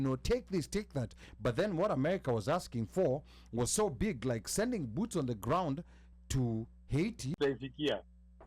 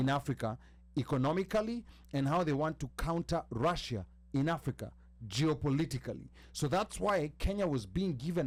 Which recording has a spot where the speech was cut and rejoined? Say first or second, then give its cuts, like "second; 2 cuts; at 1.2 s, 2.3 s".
first; 1 cut; at 7.3 s